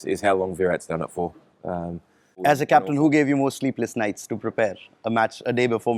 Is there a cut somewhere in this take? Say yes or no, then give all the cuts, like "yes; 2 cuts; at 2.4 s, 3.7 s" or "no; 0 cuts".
yes; 1 cut; at 2.4 s